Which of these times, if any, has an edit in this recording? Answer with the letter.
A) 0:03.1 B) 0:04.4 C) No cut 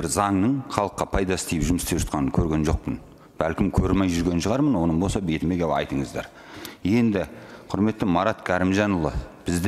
C